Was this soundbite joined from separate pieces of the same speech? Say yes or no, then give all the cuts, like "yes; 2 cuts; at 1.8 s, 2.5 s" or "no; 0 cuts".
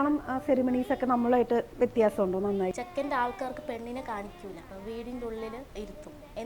yes; 3 cuts; at 2.8 s, 4.7 s, 5.7 s